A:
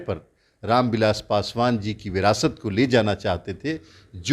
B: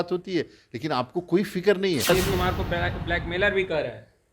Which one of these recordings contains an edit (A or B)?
B